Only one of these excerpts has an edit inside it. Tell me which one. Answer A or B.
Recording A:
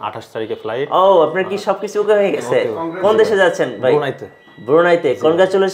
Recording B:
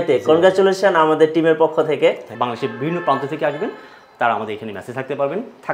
B